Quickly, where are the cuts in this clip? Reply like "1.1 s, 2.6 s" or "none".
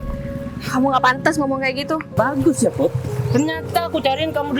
2.2 s